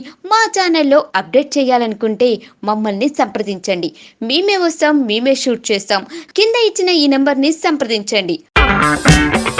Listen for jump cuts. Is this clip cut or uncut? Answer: uncut